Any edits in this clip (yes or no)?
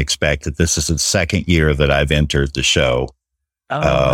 no